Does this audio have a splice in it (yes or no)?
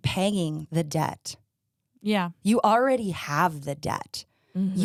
no